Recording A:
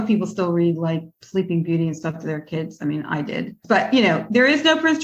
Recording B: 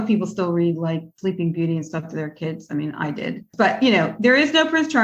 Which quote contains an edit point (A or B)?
B